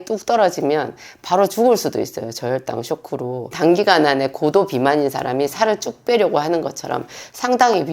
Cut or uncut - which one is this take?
cut